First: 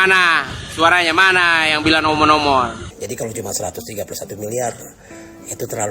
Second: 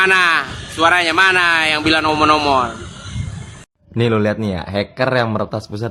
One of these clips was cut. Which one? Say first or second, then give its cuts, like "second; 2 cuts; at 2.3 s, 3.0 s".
first; 1 cut; at 2.9 s